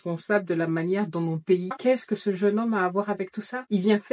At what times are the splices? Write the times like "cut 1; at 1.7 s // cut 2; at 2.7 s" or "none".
cut 1; at 1.8 s